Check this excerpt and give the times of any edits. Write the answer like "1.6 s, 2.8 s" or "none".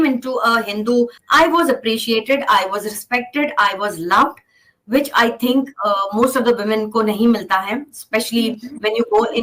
1.2 s